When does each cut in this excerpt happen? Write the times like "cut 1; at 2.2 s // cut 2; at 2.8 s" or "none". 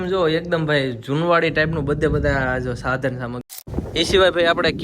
cut 1; at 3.5 s

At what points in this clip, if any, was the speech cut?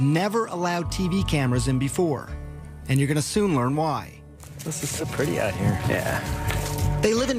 cut 1; at 3.5 s

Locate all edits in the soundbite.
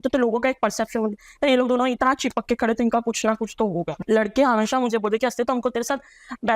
cut 1; at 3.9 s

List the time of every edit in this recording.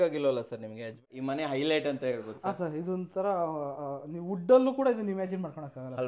cut 1; at 1.0 s

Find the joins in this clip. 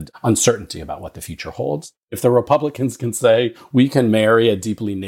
cut 1; at 2.0 s // cut 2; at 3.6 s

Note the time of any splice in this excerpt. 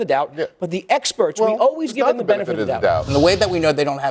cut 1; at 3.1 s

